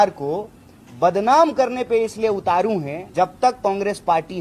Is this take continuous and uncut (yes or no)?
no